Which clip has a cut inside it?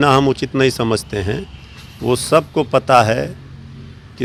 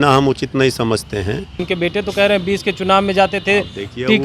second; 1 cut; at 1.6 s

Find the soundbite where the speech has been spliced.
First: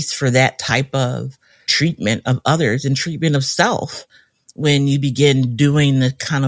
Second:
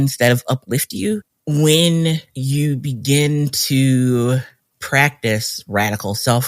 second; 1 cut; at 1.3 s

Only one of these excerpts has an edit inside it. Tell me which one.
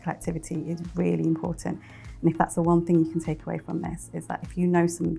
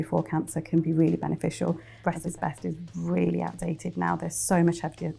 second; 1 cut; at 1.9 s

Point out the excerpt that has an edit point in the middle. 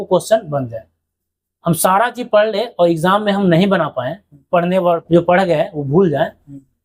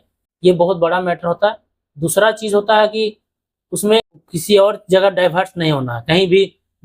second; 1 cut; at 4.1 s

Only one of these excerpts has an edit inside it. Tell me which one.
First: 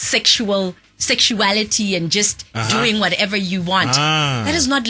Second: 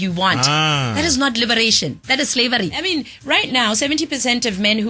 second; 1 cut; at 2.8 s

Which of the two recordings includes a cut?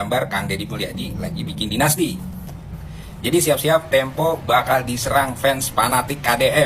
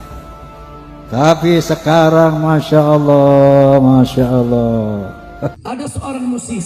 second; 1 cut; at 5.7 s

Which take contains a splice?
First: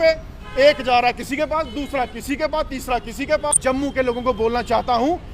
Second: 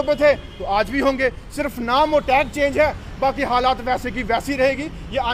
first; 1 cut; at 3.6 s

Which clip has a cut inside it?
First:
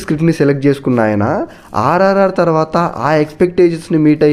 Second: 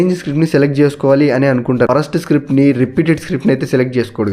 second; 1 cut; at 1.9 s

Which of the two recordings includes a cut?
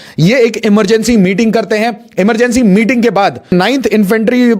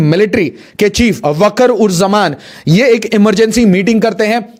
first; 1 cut; at 3.5 s

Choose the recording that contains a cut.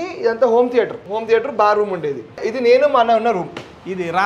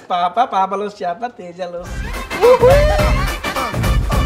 first; 2 cuts; at 1.1 s, 2.4 s

